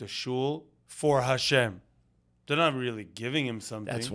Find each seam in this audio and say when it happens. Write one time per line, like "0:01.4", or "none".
none